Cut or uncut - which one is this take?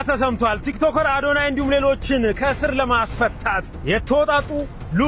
uncut